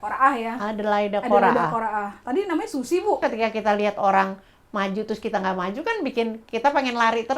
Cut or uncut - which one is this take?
cut